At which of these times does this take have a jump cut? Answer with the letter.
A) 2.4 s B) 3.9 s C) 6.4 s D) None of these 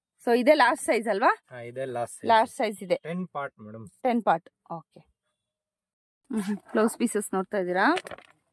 C